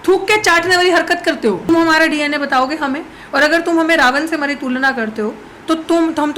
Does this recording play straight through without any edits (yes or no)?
no